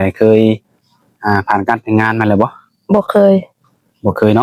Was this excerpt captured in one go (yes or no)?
yes